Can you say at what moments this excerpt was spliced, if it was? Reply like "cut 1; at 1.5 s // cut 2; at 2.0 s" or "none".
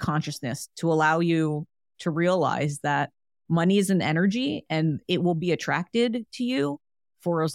none